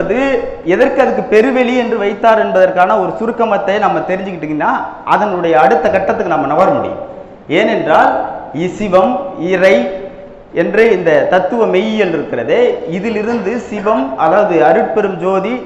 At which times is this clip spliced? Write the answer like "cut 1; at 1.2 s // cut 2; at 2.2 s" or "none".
none